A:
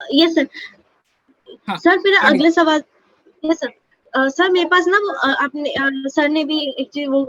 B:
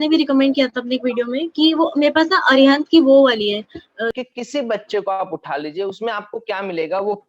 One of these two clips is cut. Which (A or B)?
B